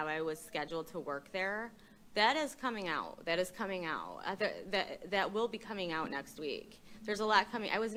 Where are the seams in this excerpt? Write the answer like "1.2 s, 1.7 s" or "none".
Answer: none